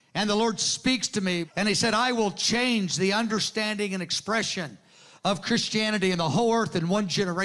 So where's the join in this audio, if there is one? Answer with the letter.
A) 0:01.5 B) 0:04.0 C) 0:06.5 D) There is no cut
A